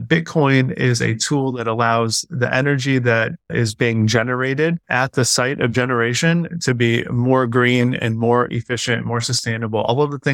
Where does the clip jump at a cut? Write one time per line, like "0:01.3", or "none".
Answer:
0:03.5
0:04.9

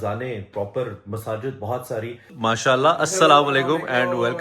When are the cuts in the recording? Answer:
0:02.3

